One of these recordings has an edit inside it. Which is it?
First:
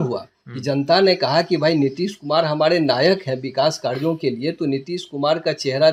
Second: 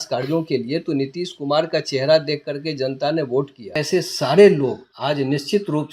second; 2 cuts; at 3.8 s, 4.9 s

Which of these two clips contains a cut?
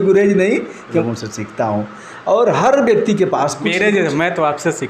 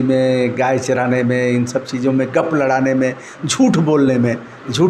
first; 1 cut; at 1.0 s

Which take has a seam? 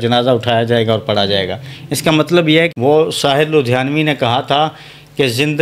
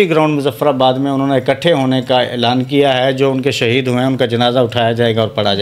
first; 1 cut; at 2.7 s

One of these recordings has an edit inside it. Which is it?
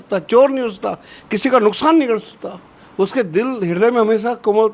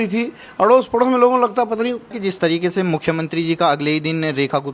second; 1 cut; at 2.1 s

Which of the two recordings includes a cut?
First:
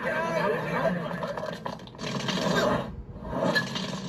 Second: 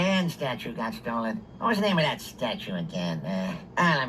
second; 1 cut; at 1.3 s

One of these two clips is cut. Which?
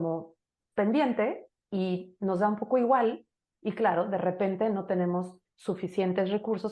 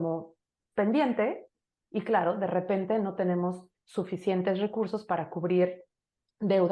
second; 1 cut; at 1.6 s

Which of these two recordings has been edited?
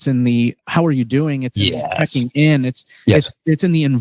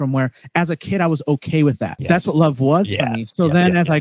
second; 1 cut; at 2.0 s

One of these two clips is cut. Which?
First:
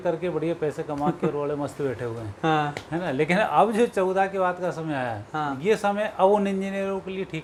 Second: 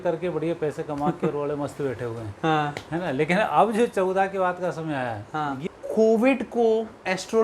second; 1 cut; at 5.6 s

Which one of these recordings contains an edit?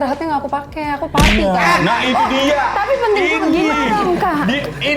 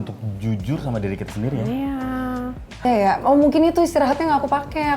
second; 1 cut; at 2.8 s

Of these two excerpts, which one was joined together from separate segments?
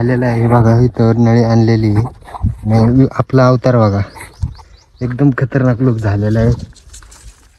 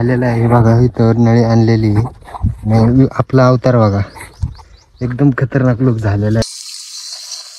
second; 1 cut; at 6.4 s

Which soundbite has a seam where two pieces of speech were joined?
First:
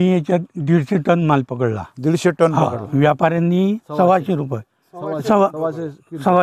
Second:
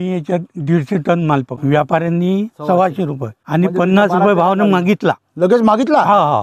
second; 2 cuts; at 1.5 s, 3.4 s

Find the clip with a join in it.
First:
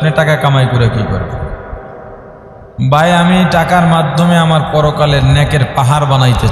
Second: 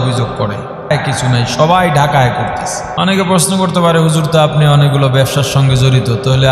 second; 2 cuts; at 0.9 s, 2.8 s

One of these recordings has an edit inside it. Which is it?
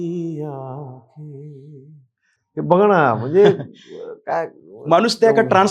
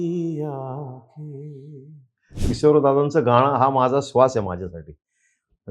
second; 1 cut; at 2.4 s

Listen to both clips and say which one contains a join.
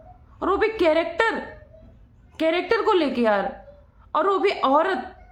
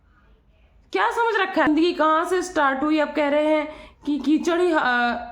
second; 1 cut; at 1.7 s

